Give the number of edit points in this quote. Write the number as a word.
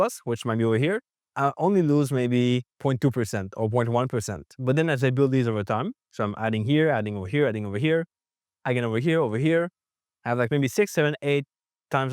one